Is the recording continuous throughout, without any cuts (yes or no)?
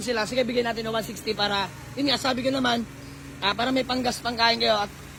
yes